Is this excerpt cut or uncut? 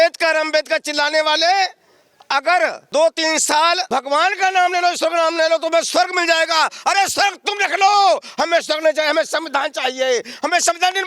cut